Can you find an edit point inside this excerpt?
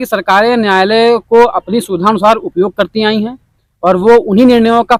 no; 0 cuts

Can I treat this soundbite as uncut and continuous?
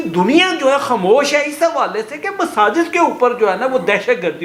yes; 0 cuts

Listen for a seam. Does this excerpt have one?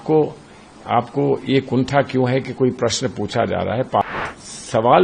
yes; 1 cut; at 4.1 s

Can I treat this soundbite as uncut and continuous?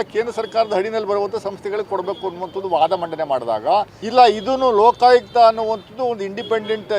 no; 1 cut; at 4.0 s

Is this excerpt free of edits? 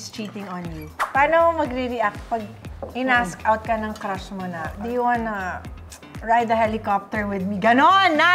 no; 2 cuts; at 0.9 s, 4.8 s

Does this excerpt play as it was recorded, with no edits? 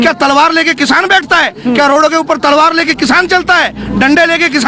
yes; 0 cuts

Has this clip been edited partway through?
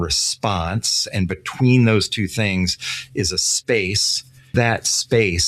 yes; 2 cuts; at 1.0 s, 4.5 s

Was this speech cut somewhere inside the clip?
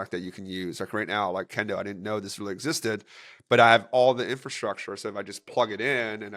no; 0 cuts

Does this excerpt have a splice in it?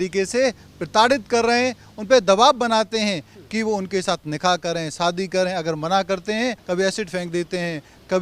yes; 1 cut; at 6.6 s

